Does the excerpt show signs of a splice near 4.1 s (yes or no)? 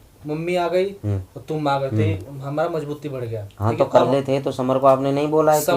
yes